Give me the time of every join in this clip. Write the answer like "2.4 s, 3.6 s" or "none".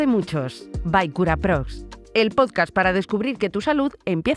none